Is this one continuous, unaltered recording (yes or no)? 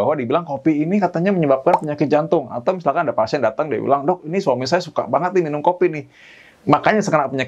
yes